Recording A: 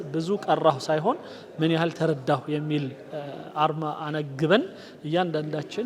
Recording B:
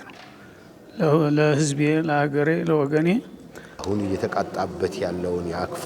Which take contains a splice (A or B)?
B